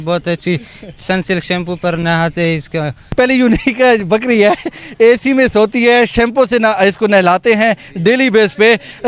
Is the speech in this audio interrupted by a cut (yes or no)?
yes